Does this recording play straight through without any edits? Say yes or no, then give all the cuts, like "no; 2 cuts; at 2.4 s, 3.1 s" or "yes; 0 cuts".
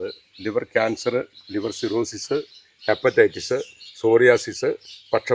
yes; 0 cuts